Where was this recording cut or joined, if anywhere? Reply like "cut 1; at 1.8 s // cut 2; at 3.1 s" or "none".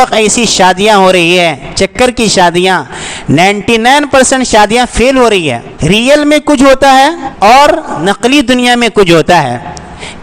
cut 1; at 5.7 s // cut 2; at 7.2 s // cut 3; at 8.0 s